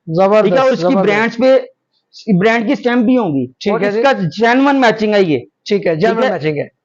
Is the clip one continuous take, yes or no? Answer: yes